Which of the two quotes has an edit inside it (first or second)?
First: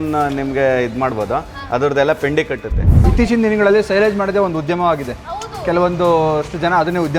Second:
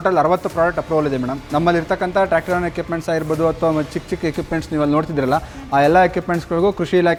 first